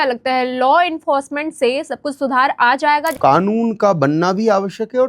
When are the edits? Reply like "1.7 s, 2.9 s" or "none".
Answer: 3.2 s